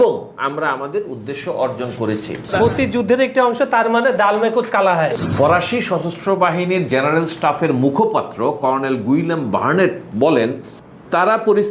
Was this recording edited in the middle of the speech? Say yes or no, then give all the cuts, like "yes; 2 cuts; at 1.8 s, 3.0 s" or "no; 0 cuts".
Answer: yes; 2 cuts; at 2.5 s, 5.1 s